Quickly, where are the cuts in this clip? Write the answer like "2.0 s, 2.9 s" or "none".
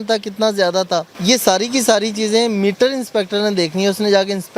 1.1 s